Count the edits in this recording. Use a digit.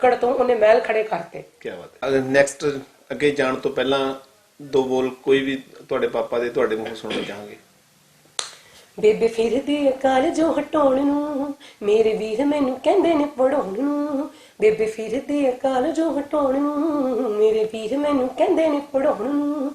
1